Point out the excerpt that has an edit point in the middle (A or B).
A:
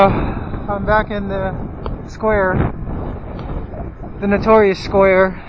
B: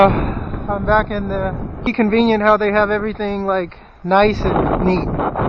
A